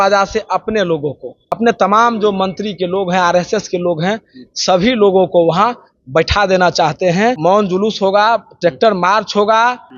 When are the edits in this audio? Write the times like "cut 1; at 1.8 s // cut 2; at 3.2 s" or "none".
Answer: cut 1; at 1.6 s // cut 2; at 7.4 s